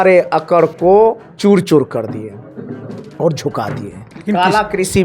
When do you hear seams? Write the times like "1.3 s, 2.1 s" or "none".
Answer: 1.3 s